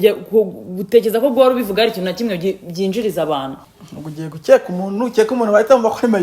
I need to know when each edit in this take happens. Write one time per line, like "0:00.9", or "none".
0:03.6

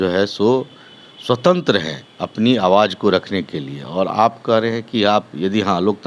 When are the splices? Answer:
none

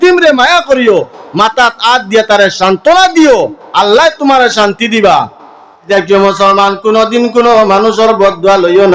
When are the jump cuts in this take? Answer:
0:05.8

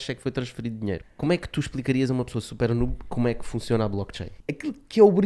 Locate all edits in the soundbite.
0:01.1
0:04.3

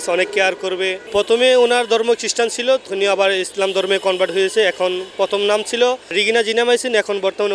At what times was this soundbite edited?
0:01.0
0:02.9
0:06.1

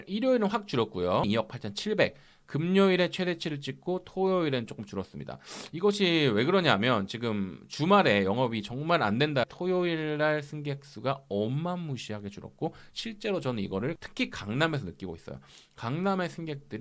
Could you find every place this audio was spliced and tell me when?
0:01.2
0:09.4
0:14.0

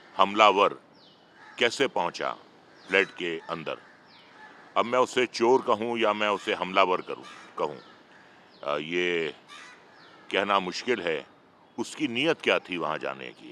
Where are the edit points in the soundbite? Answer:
none

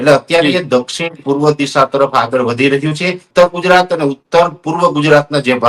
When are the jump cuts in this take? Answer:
0:03.2

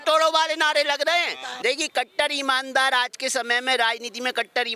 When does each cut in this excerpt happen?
0:01.4

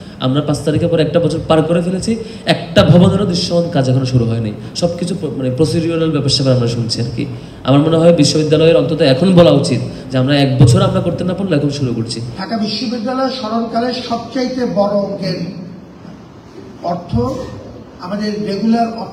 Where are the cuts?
none

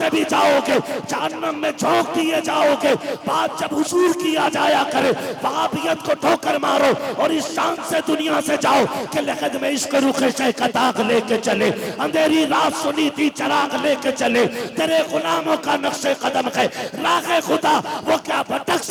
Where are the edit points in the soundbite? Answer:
none

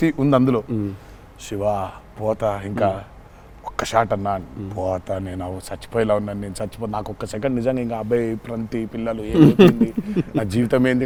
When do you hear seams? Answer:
none

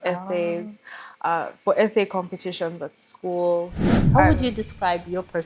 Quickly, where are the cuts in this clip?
0:03.9

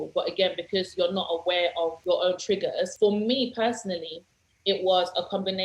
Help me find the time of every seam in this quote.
0:02.0
0:02.9

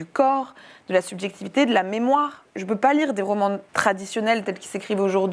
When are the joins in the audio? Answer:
0:02.5
0:03.7

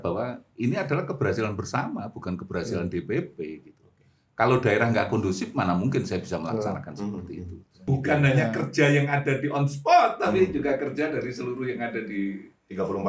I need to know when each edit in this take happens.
0:07.8

